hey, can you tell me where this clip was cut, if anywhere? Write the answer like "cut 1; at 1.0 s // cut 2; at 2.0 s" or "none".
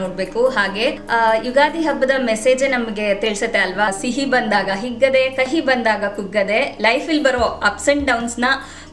none